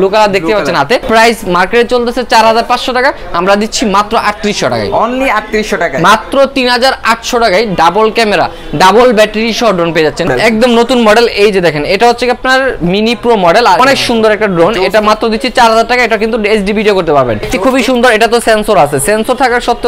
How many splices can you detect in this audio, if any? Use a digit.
4